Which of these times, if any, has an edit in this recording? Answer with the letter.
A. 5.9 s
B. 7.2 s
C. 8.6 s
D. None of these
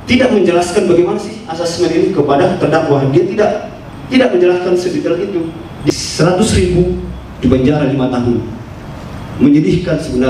A